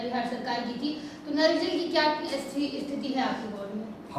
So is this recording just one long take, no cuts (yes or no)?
yes